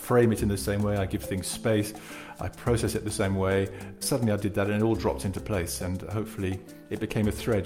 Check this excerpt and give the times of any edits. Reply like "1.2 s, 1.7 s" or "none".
4.0 s, 6.8 s